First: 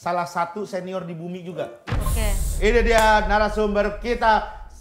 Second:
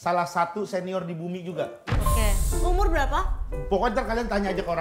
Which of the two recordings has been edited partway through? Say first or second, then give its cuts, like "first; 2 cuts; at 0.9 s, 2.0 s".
first; 1 cut; at 2.5 s